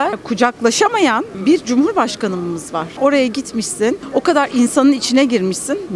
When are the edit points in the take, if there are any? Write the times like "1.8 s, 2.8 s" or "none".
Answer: none